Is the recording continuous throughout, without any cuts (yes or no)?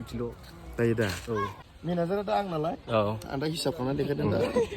no